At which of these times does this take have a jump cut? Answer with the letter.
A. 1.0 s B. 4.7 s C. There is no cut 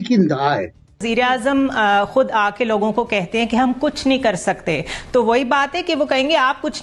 A